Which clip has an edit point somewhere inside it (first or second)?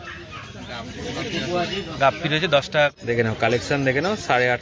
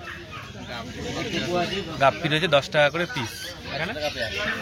first